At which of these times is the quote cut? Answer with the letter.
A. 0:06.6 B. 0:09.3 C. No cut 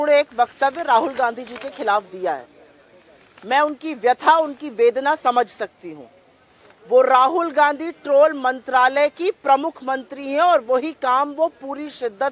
C